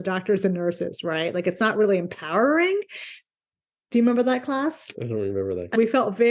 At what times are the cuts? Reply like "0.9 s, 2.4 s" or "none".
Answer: none